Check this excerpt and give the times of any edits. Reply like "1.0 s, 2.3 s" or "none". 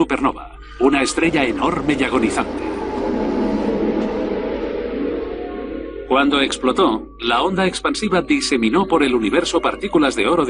9.5 s